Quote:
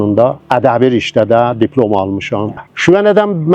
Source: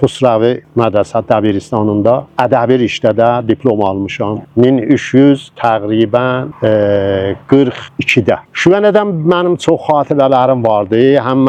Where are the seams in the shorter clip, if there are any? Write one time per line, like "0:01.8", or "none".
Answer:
0:02.6